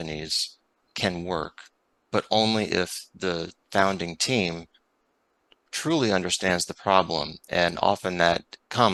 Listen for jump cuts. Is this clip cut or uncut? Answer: uncut